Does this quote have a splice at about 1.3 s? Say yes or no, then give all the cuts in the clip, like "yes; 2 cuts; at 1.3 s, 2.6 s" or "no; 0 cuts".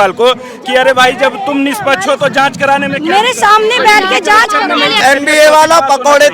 no; 1 cut; at 5.0 s